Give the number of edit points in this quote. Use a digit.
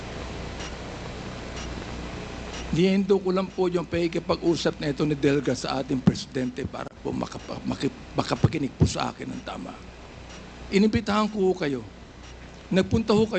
0